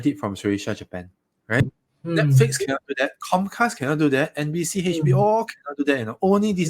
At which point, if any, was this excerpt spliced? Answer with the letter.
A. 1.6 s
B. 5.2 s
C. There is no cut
A